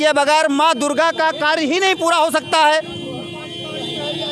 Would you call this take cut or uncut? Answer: uncut